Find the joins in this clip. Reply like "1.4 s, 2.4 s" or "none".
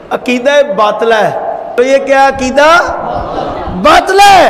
1.8 s

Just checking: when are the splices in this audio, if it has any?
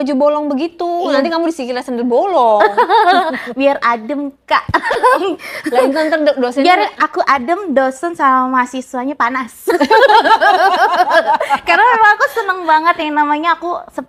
none

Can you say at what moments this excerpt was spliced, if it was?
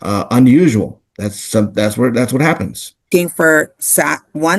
3.0 s

